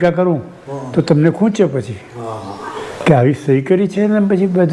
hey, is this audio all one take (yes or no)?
yes